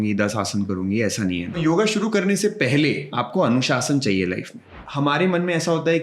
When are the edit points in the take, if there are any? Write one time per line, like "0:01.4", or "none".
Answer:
0:01.6
0:03.1
0:04.8